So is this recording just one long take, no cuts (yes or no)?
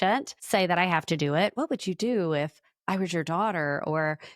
no